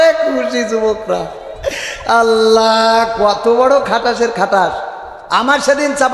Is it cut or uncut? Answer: uncut